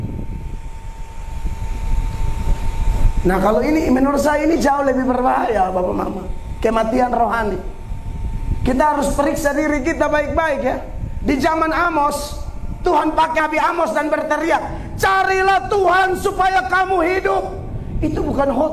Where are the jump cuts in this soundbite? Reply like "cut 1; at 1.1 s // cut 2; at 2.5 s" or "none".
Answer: cut 1; at 13.4 s